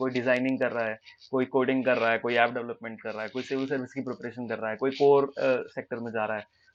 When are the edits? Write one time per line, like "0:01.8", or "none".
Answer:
none